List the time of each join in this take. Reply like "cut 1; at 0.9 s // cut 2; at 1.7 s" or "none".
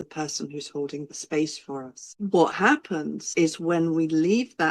cut 1; at 2.1 s // cut 2; at 3.2 s